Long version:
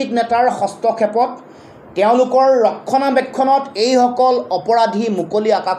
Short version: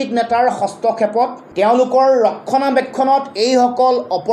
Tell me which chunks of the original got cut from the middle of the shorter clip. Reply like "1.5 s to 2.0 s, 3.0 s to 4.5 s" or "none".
1.4 s to 1.8 s